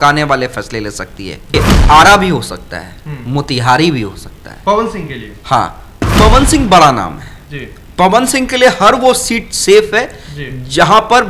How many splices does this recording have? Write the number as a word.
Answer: two